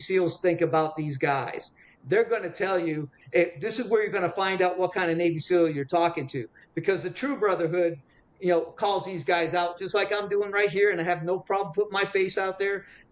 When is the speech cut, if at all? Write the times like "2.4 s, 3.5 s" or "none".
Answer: none